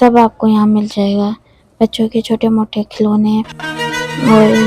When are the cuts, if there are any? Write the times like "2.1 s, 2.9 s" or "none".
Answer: none